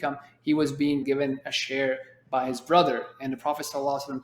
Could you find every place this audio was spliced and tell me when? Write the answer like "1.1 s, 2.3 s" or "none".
1.0 s